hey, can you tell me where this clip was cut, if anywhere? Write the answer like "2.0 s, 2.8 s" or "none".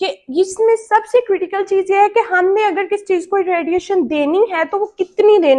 none